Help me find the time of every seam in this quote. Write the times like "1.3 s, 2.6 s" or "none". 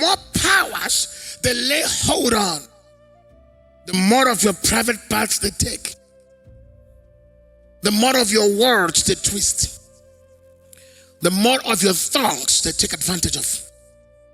5.9 s, 7.8 s, 9.7 s, 11.2 s